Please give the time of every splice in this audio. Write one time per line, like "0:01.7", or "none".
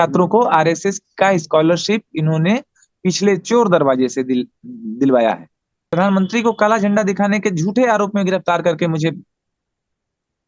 0:05.8